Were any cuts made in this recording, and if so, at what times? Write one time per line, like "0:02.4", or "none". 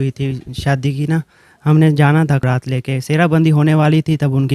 0:02.4